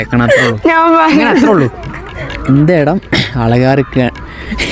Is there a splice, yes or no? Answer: no